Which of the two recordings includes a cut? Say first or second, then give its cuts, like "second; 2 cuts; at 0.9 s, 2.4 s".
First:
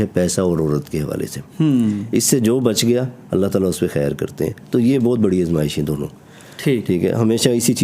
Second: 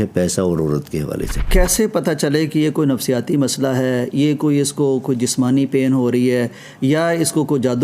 second; 1 cut; at 1.4 s